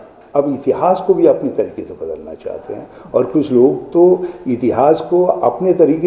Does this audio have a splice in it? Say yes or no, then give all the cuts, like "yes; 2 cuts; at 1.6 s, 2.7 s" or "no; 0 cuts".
no; 0 cuts